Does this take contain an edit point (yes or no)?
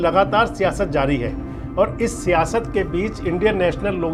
no